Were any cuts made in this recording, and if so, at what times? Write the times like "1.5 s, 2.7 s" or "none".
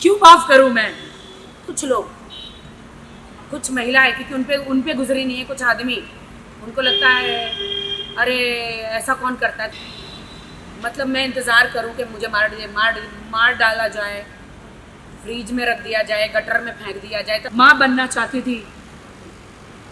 1.6 s, 9.6 s, 17.5 s